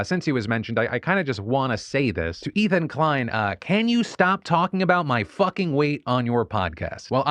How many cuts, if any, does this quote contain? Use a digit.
0